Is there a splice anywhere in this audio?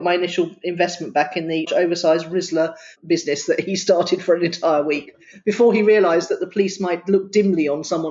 yes; 2 cuts; at 1.7 s, 2.9 s

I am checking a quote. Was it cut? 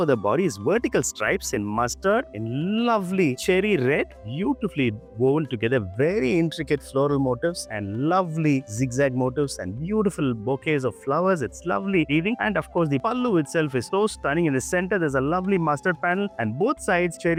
no; 0 cuts

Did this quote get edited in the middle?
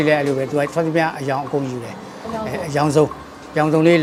no; 0 cuts

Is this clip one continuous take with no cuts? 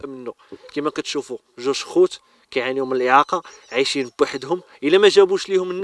yes; 0 cuts

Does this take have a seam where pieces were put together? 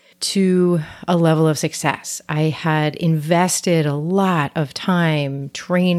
no; 0 cuts

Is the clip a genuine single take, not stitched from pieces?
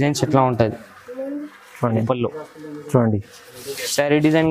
no; 1 cut; at 2.0 s

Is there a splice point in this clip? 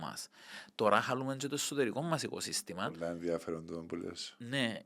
no; 0 cuts

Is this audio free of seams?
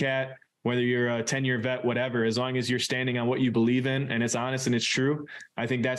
yes; 0 cuts

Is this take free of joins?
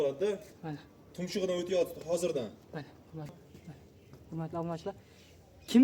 no; 1 cut; at 3.3 s

